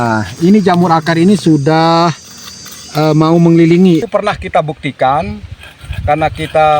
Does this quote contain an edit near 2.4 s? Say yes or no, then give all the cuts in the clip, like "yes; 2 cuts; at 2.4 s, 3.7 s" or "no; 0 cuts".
no; 1 cut; at 4.0 s